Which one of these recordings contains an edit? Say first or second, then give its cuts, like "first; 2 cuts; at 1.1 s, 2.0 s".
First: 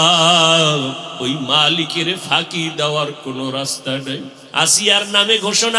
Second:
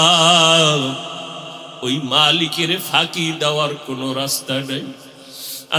first; 2 cuts; at 1.1 s, 4.4 s